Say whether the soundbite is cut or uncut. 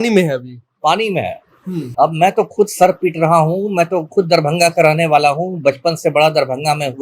cut